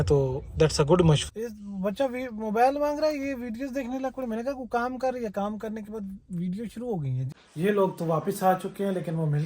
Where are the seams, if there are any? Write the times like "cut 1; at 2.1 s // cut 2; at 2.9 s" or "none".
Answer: cut 1; at 1.3 s // cut 2; at 7.4 s